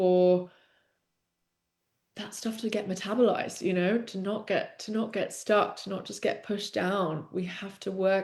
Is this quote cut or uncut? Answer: uncut